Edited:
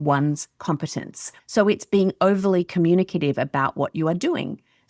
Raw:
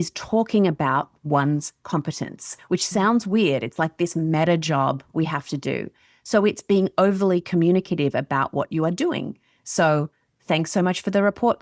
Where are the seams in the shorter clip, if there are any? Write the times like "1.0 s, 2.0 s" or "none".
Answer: 1.2 s